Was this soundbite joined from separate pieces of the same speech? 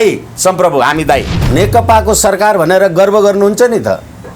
yes; 1 cut; at 1.4 s

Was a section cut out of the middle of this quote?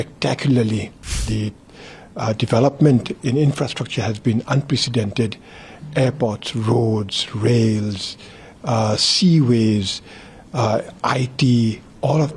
yes; 1 cut; at 1.2 s

